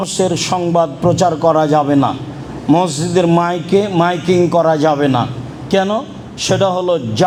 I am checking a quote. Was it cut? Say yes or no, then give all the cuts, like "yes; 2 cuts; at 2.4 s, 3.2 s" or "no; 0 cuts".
no; 0 cuts